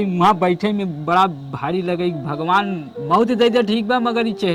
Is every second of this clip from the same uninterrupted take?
yes; 0 cuts

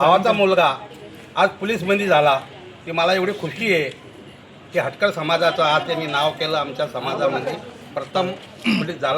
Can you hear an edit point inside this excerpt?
no; 0 cuts

